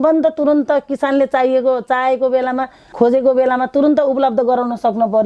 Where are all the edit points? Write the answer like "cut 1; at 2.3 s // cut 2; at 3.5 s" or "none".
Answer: cut 1; at 2.9 s